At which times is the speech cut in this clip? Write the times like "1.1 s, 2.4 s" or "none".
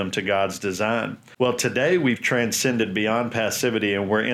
1.2 s